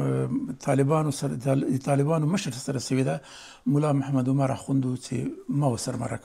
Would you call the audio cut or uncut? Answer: uncut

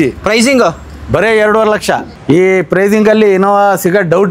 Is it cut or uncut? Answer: cut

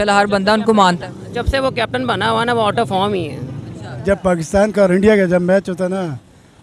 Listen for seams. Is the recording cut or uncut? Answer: cut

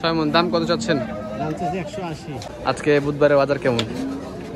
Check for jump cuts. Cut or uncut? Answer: cut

